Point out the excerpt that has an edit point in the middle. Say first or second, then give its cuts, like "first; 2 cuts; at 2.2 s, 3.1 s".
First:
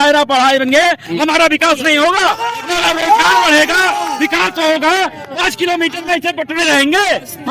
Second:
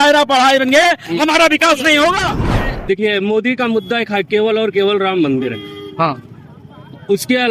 second; 1 cut; at 2.6 s